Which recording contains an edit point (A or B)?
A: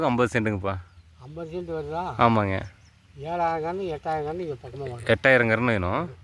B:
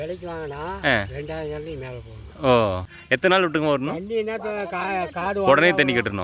B